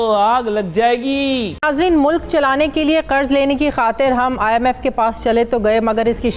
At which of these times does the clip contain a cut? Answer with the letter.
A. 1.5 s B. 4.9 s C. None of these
A